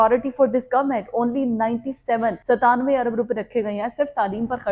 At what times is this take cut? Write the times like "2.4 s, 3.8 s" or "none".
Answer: 2.4 s